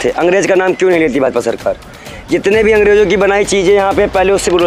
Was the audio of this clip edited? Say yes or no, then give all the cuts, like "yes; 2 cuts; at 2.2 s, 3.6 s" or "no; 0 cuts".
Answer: no; 0 cuts